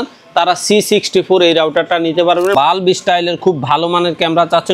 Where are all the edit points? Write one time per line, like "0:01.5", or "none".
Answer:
0:02.5